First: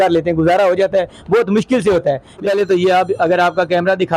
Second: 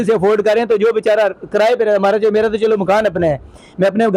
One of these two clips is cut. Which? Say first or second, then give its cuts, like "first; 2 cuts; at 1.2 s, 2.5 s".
first; 1 cut; at 2.4 s